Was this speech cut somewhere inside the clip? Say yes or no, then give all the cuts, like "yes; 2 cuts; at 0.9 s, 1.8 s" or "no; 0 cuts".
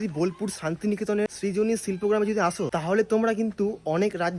yes; 2 cuts; at 1.3 s, 2.7 s